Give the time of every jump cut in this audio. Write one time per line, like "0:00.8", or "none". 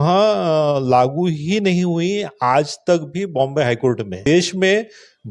0:04.2